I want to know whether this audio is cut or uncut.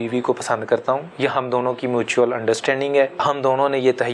cut